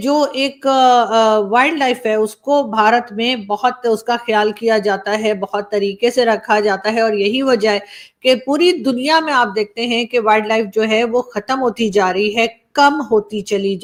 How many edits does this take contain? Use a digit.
0